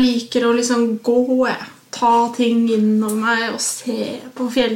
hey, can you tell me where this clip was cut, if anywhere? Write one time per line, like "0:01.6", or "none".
none